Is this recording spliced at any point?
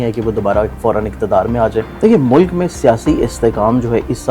yes; 1 cut; at 1.9 s

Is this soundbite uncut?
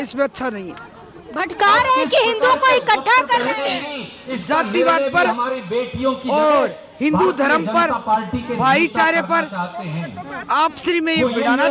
yes; 0 cuts

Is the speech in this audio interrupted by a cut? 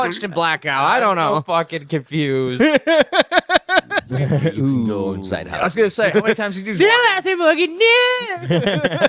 yes; 1 cut; at 4.0 s

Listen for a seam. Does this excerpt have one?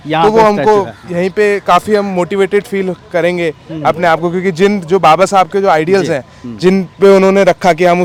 no; 0 cuts

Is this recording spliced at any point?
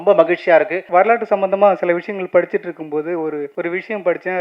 yes; 2 cuts; at 0.8 s, 3.5 s

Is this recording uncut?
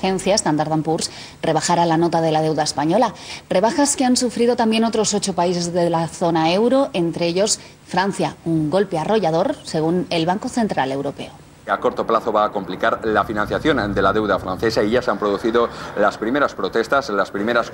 yes; 0 cuts

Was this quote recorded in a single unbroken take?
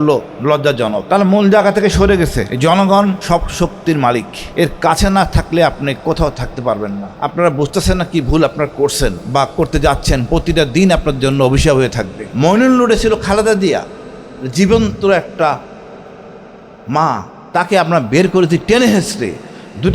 no; 7 cuts; at 1.0 s, 2.5 s, 3.2 s, 4.4 s, 7.1 s, 9.2 s, 12.2 s

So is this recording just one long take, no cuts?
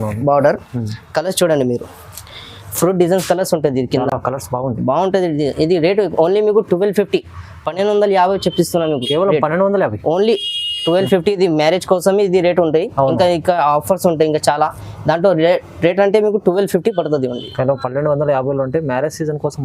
yes; 0 cuts

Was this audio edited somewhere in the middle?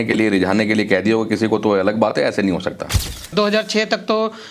yes; 1 cut; at 3.2 s

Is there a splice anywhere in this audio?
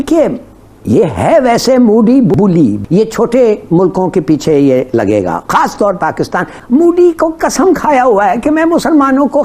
yes; 1 cut; at 2.3 s

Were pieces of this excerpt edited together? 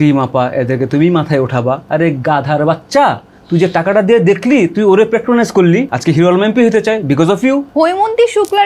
yes; 3 cuts; at 1.8 s, 5.9 s, 7.7 s

